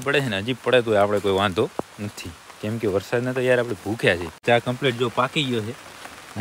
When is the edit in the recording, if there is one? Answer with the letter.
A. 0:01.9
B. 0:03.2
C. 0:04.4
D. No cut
C